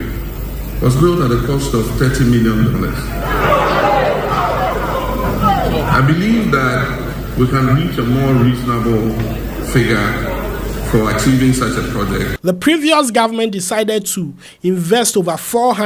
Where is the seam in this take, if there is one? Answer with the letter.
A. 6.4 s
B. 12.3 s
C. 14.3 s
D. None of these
B